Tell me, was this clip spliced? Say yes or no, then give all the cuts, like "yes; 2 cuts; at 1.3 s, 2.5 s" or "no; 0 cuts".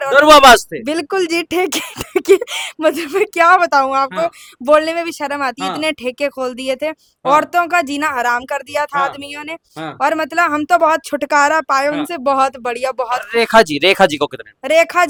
no; 0 cuts